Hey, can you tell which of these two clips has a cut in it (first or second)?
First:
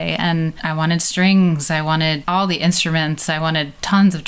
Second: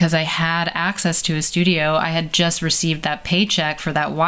first